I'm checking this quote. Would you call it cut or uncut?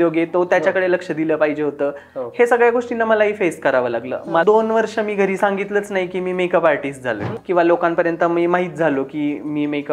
cut